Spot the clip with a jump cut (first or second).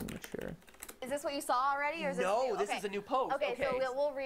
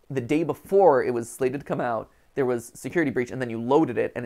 first